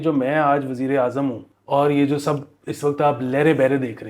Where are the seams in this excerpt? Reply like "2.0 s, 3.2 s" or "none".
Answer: 1.5 s